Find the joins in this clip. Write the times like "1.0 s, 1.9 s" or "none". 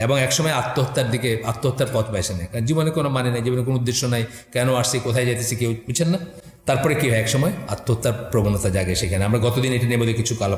none